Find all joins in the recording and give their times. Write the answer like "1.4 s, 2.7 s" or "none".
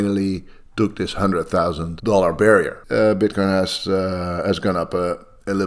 1.9 s, 2.8 s